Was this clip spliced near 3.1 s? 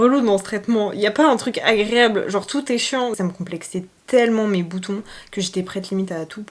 yes; 1 cut; at 3.1 s

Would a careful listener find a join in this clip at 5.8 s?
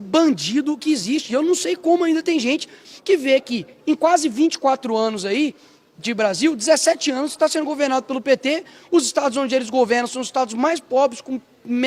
no; 0 cuts

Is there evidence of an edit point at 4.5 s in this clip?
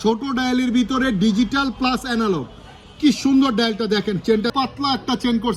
yes; 1 cut; at 4.5 s

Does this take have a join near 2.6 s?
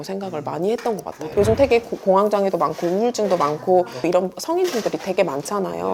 no; 2 cuts; at 1.1 s, 4.0 s

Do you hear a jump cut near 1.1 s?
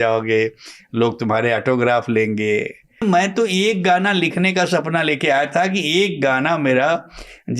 no; 1 cut; at 3.0 s

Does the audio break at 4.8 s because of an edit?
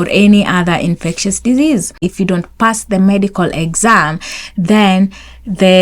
no; 1 cut; at 2.0 s

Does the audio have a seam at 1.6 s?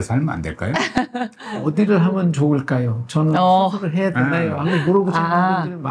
yes; 1 cut; at 1.6 s

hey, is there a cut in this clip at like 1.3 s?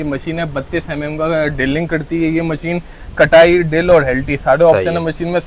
no; 0 cuts

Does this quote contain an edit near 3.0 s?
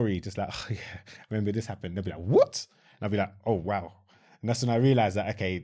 no; 0 cuts

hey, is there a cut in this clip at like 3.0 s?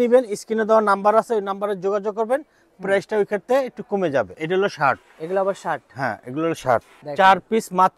no; 2 cuts; at 4.4 s, 6.9 s

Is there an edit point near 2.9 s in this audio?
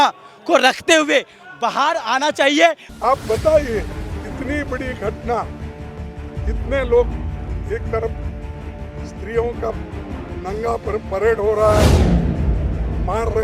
yes; 1 cut; at 2.9 s

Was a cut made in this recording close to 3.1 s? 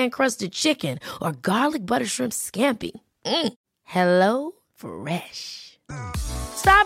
no; 0 cuts

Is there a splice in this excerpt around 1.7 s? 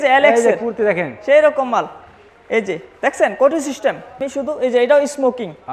no; 1 cut; at 4.1 s

